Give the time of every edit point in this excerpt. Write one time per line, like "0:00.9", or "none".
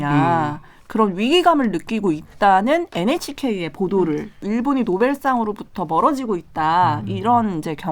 0:04.4